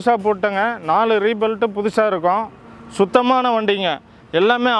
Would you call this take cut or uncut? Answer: uncut